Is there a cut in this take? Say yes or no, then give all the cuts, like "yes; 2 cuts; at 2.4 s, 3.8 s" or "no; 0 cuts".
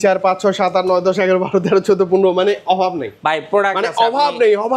no; 0 cuts